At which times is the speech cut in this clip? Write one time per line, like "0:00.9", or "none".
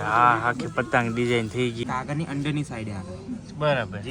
0:01.8